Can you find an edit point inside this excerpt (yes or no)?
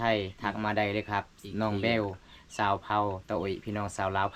no